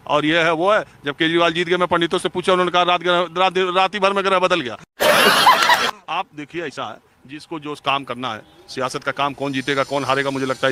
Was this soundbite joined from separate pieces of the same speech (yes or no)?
no